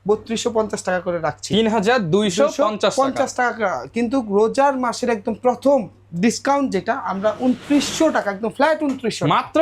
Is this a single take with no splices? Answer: yes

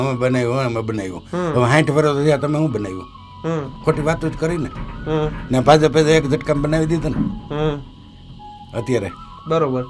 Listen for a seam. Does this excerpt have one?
no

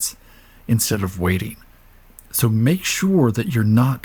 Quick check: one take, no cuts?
yes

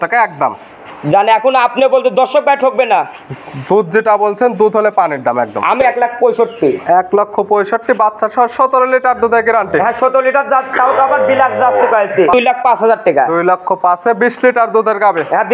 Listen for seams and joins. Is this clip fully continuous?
no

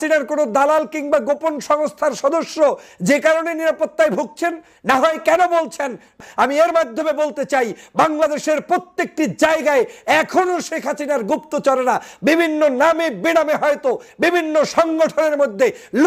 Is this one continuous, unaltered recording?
no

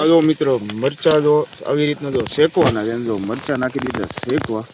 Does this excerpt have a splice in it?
no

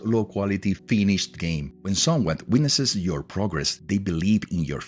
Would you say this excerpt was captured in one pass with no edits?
no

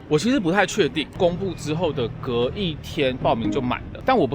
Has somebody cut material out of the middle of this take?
yes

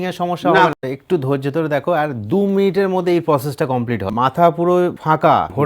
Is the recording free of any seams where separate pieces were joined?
no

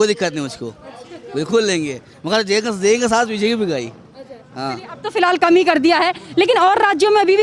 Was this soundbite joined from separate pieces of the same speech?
no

